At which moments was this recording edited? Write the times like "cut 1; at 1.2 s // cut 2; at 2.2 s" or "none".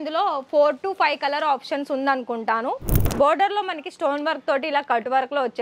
cut 1; at 2.9 s

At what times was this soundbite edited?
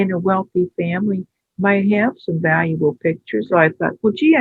cut 1; at 3.5 s

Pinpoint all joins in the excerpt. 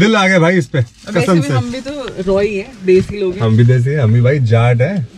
none

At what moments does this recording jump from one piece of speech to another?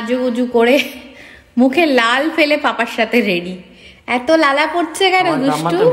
none

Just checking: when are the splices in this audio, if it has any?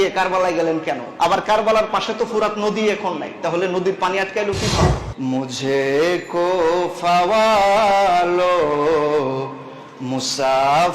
cut 1; at 1.1 s // cut 2; at 5.0 s

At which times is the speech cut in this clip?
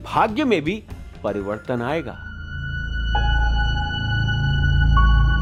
none

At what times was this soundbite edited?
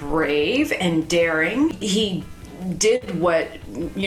cut 1; at 1.8 s

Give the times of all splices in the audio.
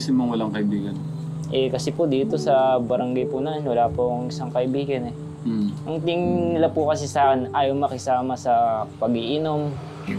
none

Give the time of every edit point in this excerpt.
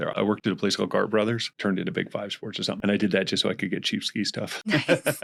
none

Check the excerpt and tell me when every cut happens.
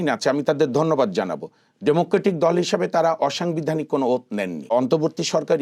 cut 1; at 4.6 s

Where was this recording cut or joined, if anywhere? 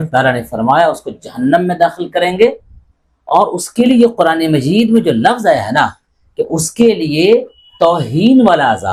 none

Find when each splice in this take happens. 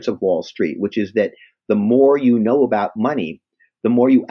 none

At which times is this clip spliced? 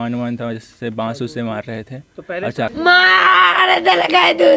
cut 1; at 2.7 s

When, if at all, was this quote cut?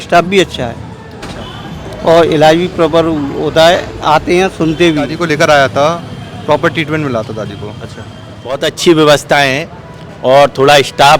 cut 1; at 5.1 s // cut 2; at 8.7 s

